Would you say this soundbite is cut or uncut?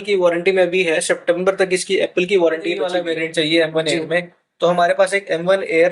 cut